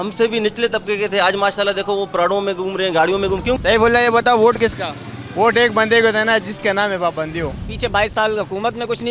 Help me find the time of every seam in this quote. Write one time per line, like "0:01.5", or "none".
0:03.6
0:07.6